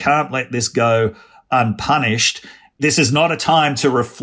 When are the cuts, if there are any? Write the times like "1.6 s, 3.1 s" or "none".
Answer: 2.6 s